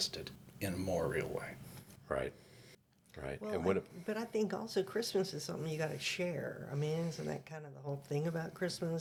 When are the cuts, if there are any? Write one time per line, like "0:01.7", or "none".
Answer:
none